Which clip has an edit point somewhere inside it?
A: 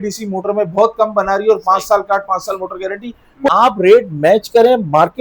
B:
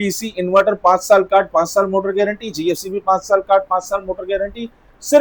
A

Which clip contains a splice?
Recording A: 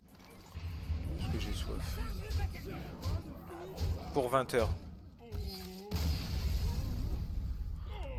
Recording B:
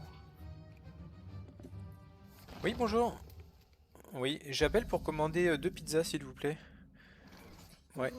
B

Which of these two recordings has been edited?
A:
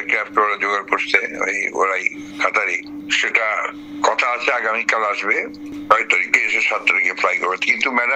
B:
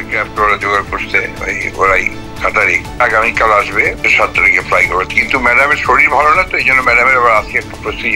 B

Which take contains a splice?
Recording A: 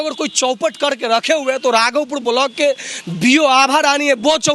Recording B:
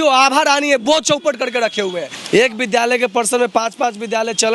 B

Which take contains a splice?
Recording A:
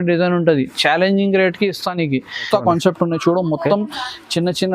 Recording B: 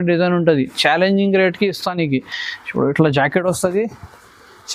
A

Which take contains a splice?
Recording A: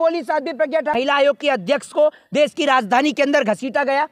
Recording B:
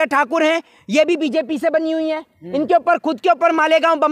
A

